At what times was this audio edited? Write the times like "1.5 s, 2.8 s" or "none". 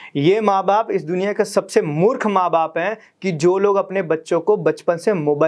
none